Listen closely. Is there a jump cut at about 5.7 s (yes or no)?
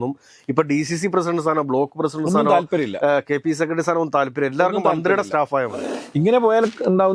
yes